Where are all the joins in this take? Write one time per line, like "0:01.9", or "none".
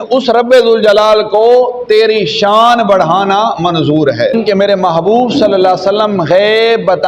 0:04.3